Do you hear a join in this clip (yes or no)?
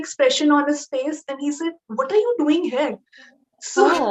no